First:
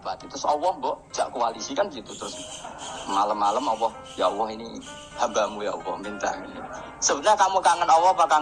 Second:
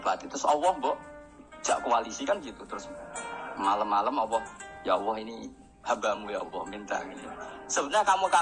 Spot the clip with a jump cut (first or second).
first